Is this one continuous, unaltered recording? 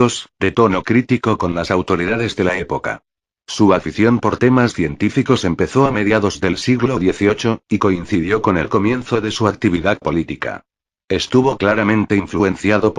yes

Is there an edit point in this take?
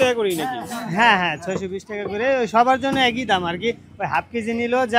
no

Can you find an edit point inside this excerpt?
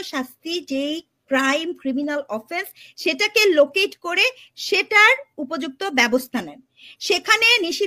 no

